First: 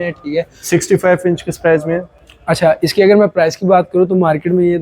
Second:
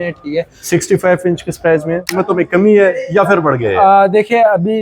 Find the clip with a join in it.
second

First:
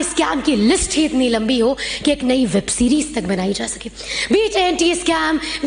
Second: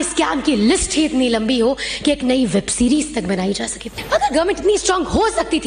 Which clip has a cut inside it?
second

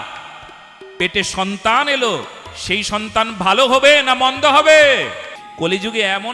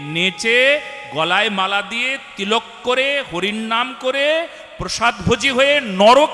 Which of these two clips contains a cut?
first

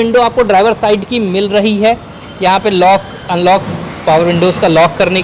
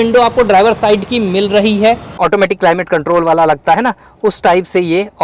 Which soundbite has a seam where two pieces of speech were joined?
second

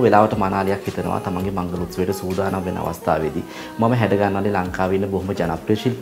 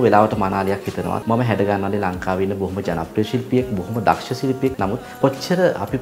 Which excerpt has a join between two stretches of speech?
second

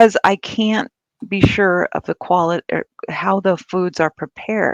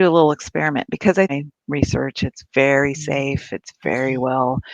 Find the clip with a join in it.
second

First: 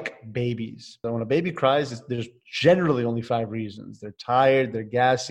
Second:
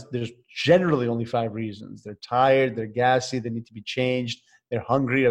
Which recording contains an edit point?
first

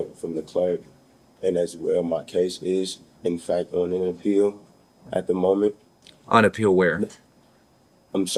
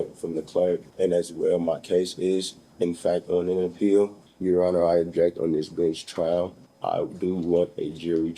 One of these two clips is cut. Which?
second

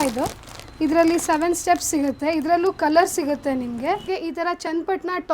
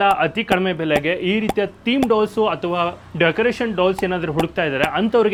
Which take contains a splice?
first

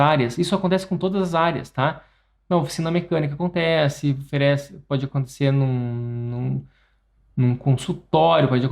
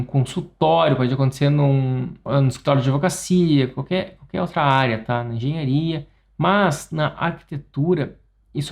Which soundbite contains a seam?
second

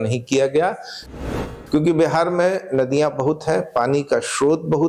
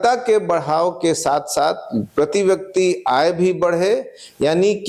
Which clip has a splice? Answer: first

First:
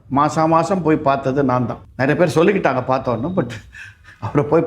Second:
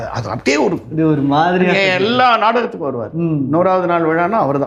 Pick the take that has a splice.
first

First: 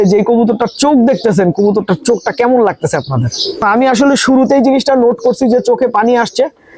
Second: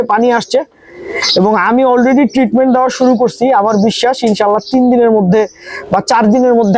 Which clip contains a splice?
first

